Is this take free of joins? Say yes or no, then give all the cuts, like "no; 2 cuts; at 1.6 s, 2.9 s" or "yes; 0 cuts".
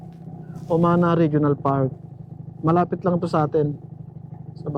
yes; 0 cuts